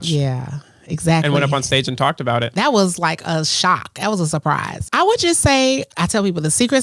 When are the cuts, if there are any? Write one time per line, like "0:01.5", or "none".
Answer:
0:02.5
0:04.8
0:05.9